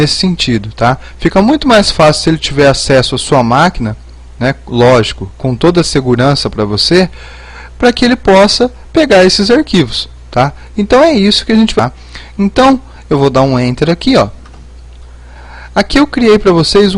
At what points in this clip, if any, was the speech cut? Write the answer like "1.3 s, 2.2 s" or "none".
11.7 s